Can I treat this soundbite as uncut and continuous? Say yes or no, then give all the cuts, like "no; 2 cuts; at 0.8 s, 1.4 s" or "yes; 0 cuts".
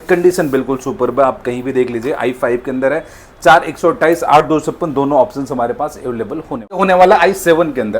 no; 1 cut; at 6.8 s